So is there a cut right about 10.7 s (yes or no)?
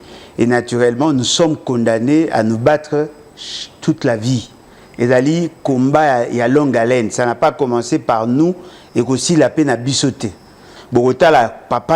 yes